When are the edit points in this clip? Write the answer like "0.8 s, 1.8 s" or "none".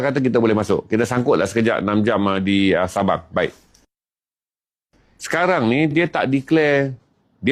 none